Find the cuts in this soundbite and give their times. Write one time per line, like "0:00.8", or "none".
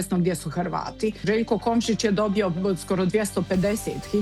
0:01.2